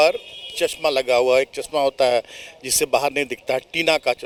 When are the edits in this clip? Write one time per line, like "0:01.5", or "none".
none